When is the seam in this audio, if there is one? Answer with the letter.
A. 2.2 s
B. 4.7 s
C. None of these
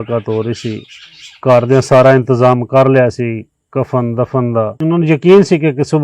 B